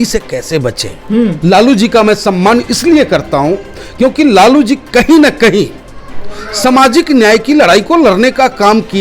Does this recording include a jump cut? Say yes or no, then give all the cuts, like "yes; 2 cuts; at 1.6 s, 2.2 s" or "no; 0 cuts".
yes; 1 cut; at 1.4 s